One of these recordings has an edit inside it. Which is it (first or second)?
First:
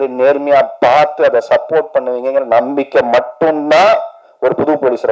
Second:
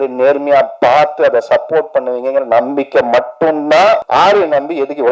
second